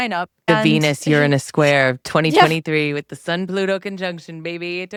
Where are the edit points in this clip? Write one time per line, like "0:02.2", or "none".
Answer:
none